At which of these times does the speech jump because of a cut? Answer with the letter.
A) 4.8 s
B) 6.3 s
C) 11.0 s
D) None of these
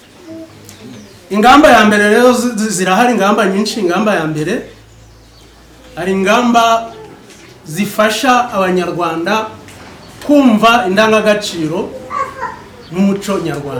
D